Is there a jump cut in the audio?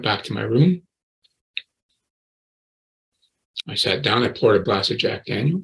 yes; 1 cut; at 4.6 s

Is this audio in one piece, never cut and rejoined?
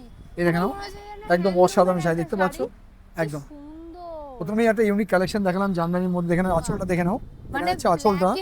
yes; 0 cuts

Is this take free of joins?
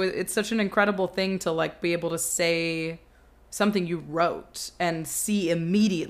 yes; 0 cuts

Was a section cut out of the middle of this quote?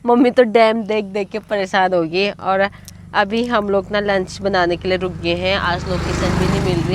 no; 0 cuts

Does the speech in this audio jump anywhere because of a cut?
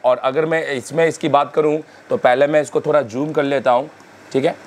no; 0 cuts

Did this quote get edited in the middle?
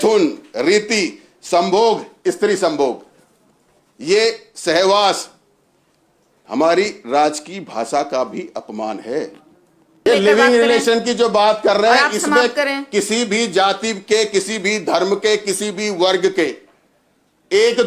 yes; 1 cut; at 10.1 s

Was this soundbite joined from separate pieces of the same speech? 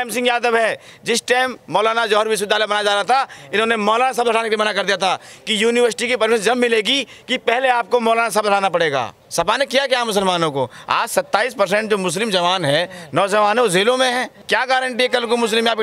yes; 2 cuts; at 9.2 s, 14.5 s

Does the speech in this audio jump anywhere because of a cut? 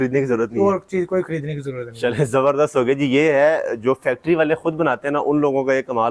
no; 0 cuts

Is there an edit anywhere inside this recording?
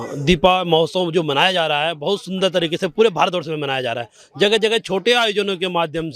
no; 0 cuts

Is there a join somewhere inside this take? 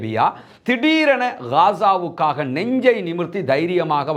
no; 0 cuts

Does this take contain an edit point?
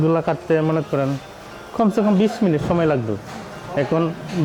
no; 0 cuts

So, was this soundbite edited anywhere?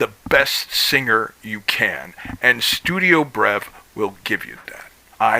no; 0 cuts

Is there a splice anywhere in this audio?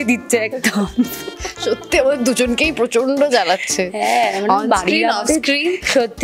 no; 0 cuts

